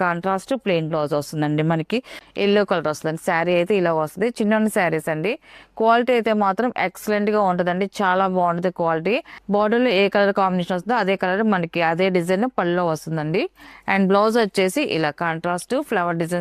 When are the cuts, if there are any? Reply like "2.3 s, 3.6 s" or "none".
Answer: 2.2 s, 9.4 s